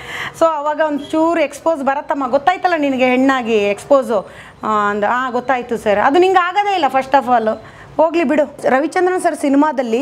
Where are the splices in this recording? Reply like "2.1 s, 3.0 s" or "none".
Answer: 8.6 s

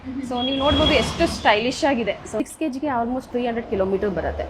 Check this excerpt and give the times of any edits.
2.4 s

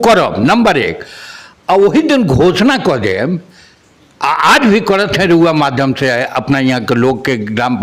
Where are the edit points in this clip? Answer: none

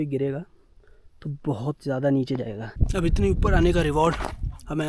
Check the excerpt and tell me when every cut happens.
2.8 s

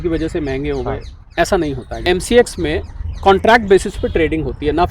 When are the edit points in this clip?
2.0 s

